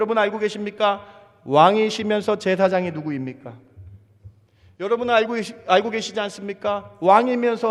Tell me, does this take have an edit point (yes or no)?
no